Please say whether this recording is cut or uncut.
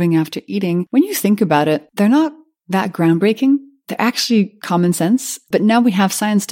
cut